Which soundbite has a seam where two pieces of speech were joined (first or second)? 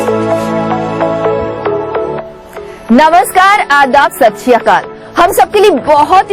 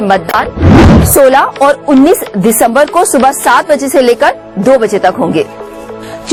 first